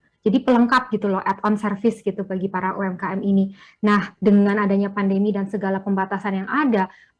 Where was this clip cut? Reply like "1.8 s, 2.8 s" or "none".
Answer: none